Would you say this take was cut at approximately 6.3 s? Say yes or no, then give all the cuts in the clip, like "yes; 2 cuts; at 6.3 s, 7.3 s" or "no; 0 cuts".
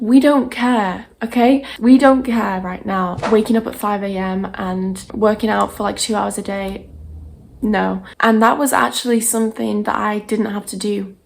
no; 2 cuts; at 3.2 s, 8.1 s